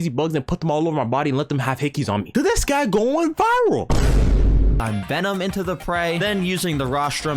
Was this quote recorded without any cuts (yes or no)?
no